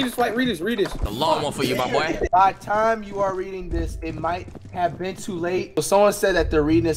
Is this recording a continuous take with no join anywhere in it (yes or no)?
no